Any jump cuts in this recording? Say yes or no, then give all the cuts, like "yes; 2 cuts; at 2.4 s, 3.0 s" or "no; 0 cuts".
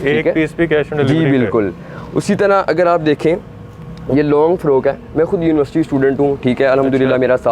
no; 0 cuts